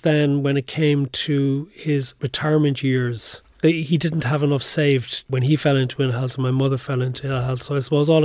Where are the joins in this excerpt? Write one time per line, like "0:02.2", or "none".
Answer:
0:02.2
0:03.6
0:05.3